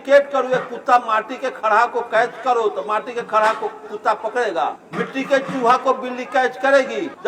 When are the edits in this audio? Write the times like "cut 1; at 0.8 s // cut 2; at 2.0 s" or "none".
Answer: none